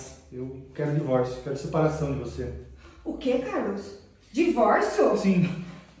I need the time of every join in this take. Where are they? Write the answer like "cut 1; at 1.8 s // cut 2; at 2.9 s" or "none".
none